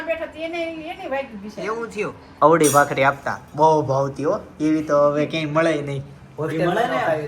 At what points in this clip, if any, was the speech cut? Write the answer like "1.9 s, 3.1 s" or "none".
2.2 s